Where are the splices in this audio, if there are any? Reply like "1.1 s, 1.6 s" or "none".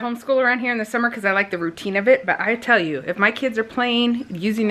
none